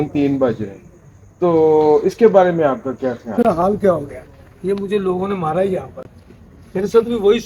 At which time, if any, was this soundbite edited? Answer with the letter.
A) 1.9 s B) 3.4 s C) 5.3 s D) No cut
B